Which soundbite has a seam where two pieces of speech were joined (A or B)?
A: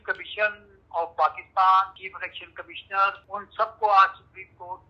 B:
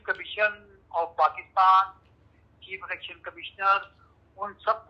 A